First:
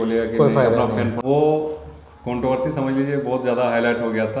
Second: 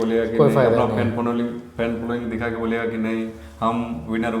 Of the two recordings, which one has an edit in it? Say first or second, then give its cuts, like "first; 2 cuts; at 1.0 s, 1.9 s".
first; 1 cut; at 1.2 s